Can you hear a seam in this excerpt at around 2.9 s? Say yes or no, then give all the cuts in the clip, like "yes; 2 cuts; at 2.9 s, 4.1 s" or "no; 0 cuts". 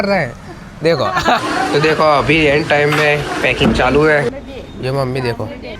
no; 2 cuts; at 1.4 s, 4.3 s